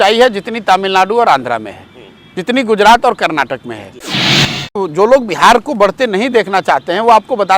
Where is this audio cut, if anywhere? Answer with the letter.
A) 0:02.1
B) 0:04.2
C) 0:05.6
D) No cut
B